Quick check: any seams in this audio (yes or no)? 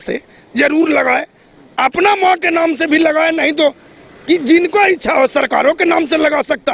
no